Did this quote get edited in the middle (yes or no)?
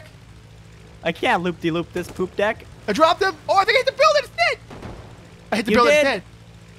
yes